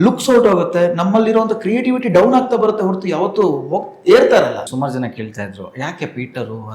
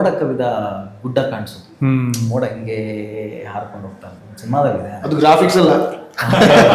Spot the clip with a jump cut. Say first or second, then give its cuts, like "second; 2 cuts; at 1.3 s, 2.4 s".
first; 1 cut; at 4.7 s